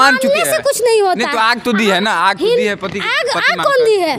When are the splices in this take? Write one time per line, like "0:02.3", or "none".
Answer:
none